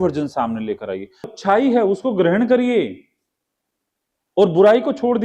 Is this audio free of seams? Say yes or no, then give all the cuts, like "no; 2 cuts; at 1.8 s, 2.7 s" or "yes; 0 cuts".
no; 1 cut; at 1.4 s